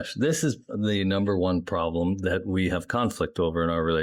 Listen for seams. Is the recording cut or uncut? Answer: uncut